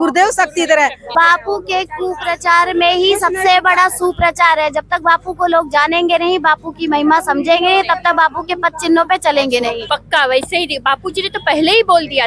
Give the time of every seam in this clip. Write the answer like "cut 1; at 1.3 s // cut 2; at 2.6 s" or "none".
cut 1; at 1.1 s // cut 2; at 9.8 s